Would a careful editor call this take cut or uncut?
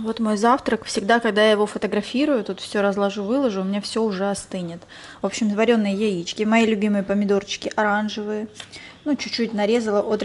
uncut